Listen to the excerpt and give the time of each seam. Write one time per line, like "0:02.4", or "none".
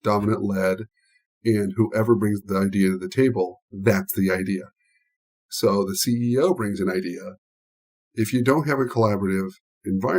0:05.4